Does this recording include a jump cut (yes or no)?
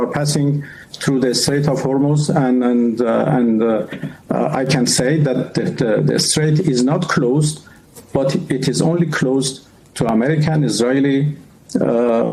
no